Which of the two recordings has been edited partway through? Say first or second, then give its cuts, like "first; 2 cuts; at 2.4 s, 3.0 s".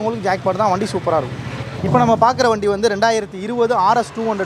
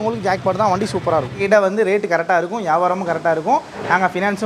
second; 1 cut; at 1.4 s